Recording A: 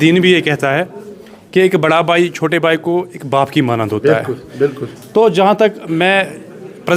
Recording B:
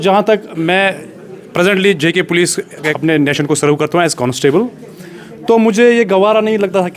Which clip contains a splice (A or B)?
B